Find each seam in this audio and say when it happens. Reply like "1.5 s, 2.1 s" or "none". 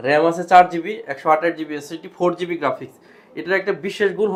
none